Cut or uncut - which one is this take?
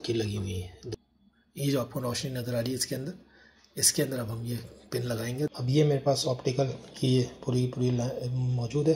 cut